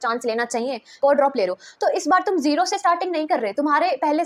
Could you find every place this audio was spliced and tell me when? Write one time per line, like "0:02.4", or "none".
0:00.9

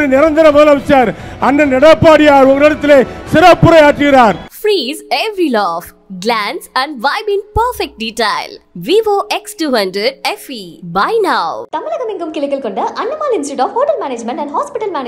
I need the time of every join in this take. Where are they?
0:04.5

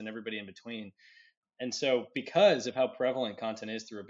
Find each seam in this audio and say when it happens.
0:01.4

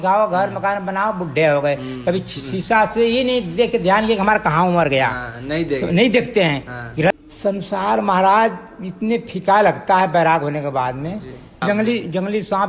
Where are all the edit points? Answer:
0:07.1
0:11.6

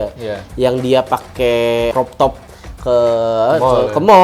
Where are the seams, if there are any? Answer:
0:01.9

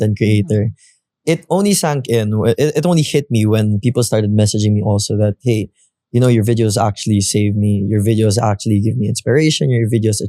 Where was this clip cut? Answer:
none

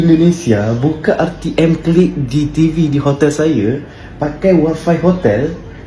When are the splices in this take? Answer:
none

